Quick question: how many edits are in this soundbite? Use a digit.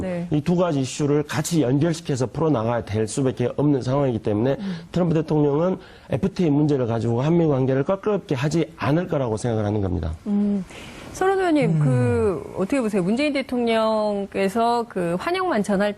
1